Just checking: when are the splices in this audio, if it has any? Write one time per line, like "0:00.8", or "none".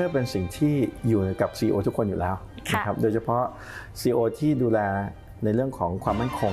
none